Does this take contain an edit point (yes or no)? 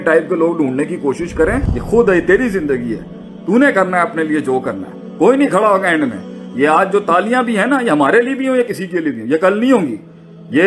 yes